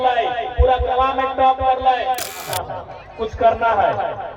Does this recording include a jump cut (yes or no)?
yes